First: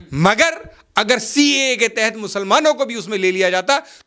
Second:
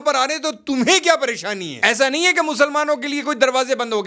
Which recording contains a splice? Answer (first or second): second